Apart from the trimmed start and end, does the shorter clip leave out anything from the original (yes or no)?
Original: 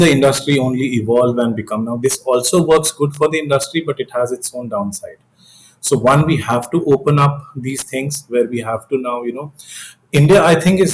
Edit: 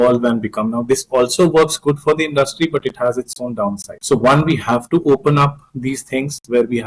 yes